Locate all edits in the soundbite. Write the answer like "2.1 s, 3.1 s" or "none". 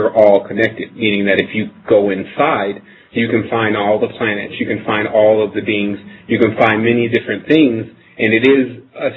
3.4 s